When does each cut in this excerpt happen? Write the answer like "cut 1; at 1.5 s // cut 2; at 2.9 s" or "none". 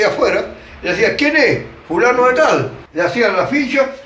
cut 1; at 2.8 s